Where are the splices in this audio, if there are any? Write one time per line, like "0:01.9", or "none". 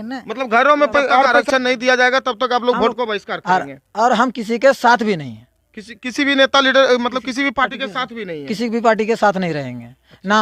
0:01.4